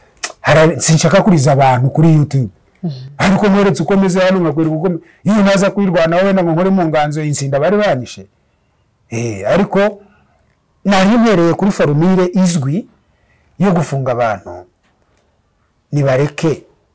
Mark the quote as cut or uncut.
uncut